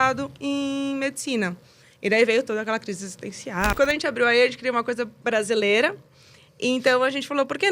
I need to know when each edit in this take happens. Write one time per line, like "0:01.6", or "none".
0:03.7